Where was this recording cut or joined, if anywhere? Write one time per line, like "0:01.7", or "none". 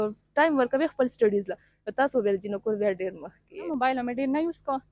0:03.6